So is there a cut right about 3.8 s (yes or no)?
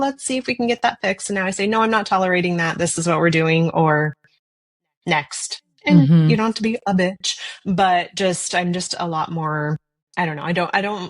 no